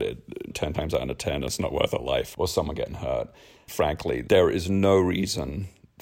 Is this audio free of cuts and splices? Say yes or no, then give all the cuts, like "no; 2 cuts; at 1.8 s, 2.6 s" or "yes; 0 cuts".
yes; 0 cuts